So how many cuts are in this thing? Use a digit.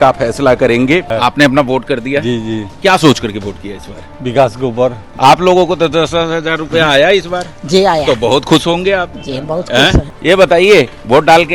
3